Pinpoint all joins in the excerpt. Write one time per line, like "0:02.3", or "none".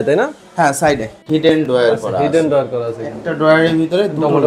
0:01.1